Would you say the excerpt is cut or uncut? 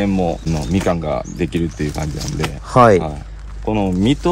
uncut